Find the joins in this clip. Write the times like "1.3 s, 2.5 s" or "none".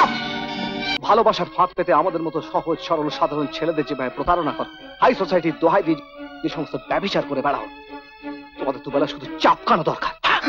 0.9 s